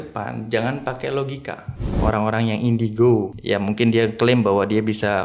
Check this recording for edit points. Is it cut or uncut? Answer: cut